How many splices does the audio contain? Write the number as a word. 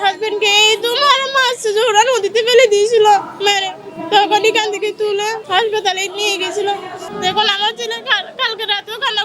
two